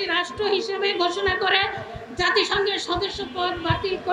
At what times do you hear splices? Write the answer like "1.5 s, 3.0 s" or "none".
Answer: none

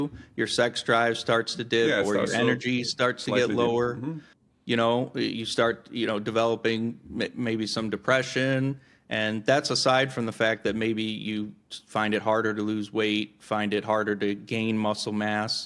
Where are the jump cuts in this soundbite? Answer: none

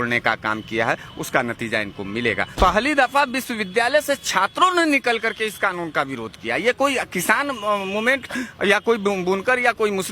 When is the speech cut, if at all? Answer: 2.5 s

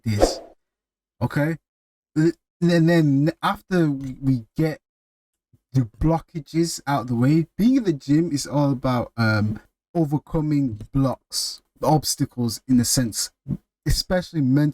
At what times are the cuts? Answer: 9.7 s, 11.6 s

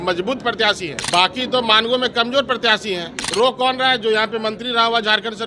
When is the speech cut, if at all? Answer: 0.9 s, 3.1 s

